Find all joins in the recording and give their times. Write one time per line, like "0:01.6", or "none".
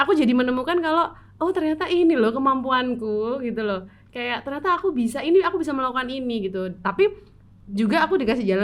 none

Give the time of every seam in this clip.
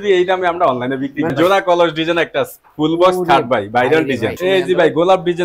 0:01.3
0:04.4

